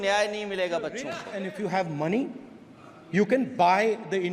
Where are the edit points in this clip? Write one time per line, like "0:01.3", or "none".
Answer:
0:01.2

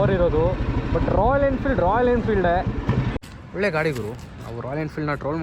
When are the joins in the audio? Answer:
0:03.1

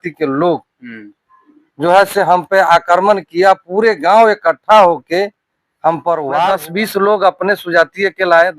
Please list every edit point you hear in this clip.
0:06.6

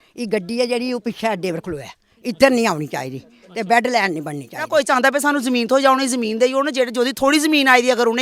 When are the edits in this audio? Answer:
0:04.7

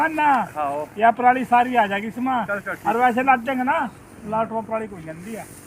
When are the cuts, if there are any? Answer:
none

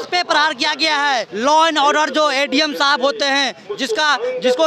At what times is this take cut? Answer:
none

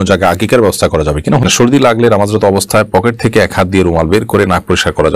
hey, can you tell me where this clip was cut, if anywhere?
0:01.4

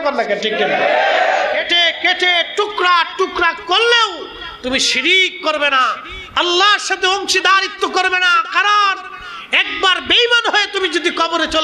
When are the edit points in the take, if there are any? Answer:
0:01.7

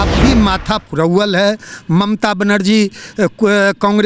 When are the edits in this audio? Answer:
none

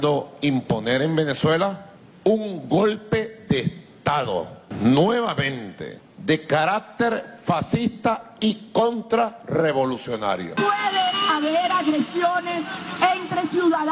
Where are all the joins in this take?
0:10.5

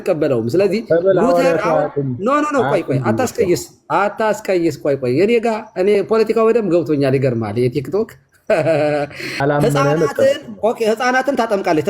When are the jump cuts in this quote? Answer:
0:09.4

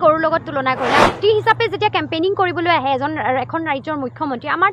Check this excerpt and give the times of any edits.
0:01.2

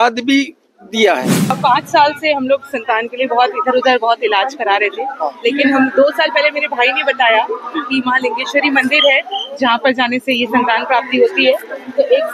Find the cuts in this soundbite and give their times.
0:01.6

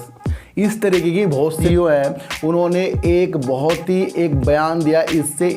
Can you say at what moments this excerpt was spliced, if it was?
0:01.6

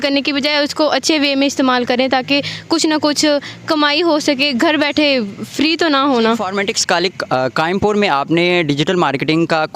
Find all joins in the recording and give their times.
0:06.5

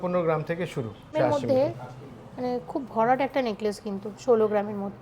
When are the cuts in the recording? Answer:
0:01.1

